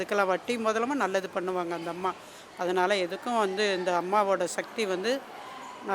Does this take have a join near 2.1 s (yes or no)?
no